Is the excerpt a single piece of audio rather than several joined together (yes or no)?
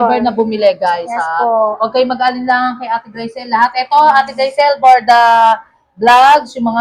yes